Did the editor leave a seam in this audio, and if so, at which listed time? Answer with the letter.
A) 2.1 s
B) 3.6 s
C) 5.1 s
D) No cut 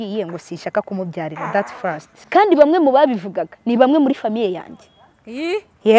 A